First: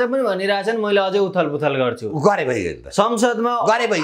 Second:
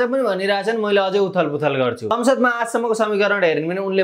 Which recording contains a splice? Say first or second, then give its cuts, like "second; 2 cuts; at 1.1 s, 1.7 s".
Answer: second; 1 cut; at 2.1 s